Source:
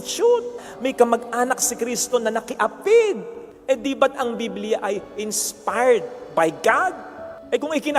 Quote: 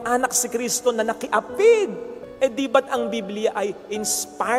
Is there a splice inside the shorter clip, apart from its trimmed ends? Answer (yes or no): no